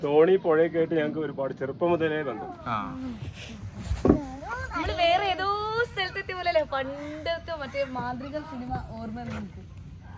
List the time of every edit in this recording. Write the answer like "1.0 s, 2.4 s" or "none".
2.6 s